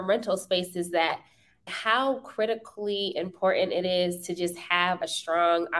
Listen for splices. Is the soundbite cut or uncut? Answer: cut